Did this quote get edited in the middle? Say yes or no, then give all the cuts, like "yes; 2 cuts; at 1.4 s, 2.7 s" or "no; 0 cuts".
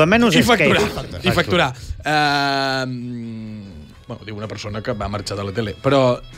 no; 0 cuts